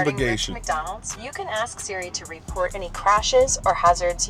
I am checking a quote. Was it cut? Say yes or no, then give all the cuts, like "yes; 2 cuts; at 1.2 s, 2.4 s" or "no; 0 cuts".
no; 0 cuts